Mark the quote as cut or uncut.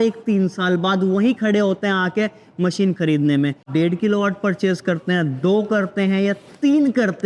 cut